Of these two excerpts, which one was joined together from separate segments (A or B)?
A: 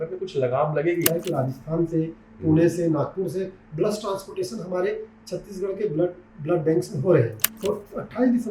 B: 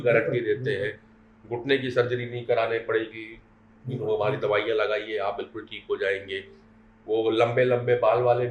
A